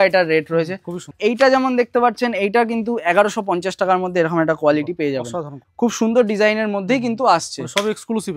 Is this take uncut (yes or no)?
no